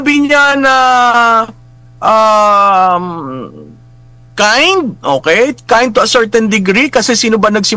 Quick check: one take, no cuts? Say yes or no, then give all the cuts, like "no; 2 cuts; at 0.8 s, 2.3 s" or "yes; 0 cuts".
yes; 0 cuts